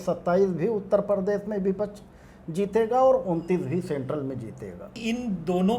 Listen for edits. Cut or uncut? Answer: cut